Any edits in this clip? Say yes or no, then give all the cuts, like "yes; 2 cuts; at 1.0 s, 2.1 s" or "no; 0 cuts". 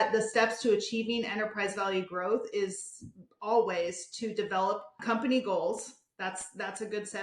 yes; 1 cut; at 5.0 s